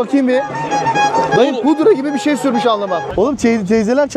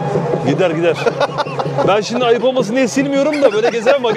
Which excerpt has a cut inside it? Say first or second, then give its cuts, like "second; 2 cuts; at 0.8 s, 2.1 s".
first; 1 cut; at 3.1 s